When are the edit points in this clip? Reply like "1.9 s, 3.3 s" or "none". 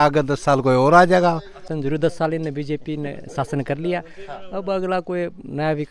1.7 s